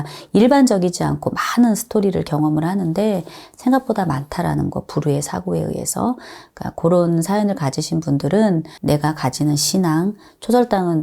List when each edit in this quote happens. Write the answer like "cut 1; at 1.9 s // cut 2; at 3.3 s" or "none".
cut 1; at 8.7 s